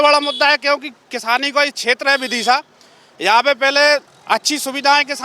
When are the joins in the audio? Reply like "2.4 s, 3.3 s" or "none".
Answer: 4.1 s